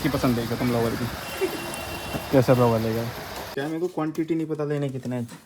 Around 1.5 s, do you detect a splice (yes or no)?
no